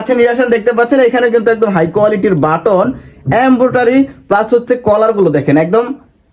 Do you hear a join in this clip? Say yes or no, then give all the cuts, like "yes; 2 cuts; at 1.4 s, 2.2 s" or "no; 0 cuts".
no; 0 cuts